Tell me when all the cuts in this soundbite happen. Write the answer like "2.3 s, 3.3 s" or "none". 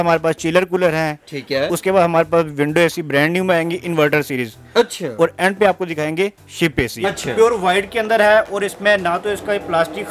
7.1 s